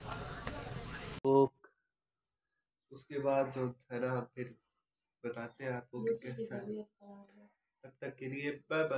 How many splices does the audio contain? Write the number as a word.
one